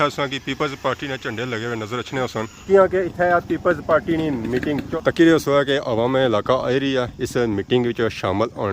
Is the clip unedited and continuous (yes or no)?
no